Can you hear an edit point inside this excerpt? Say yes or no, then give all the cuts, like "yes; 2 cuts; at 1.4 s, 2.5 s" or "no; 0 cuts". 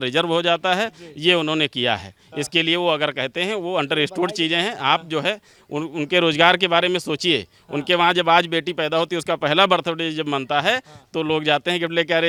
no; 0 cuts